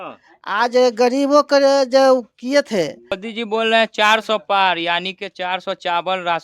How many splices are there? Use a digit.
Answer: 1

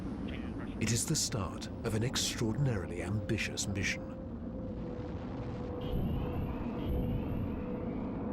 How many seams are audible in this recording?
1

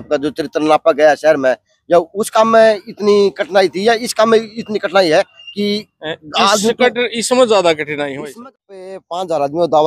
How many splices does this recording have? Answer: 1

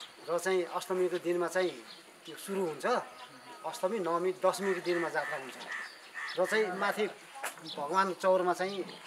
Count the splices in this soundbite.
0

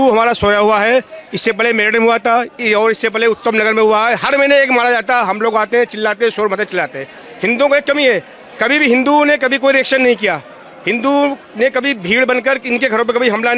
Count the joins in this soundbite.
0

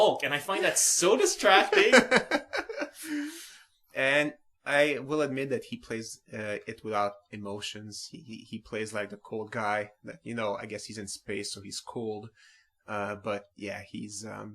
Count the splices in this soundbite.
1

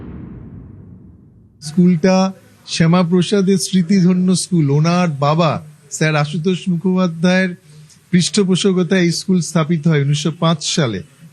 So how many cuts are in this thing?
1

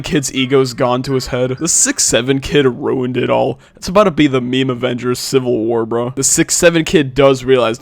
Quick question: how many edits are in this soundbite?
2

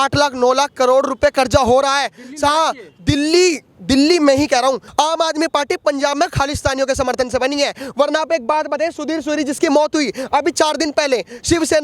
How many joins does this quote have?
1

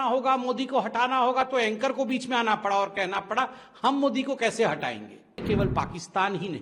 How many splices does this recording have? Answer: 1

